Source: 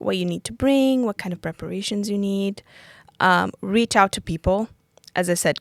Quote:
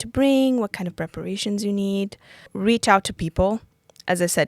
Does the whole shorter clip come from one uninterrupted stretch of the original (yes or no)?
no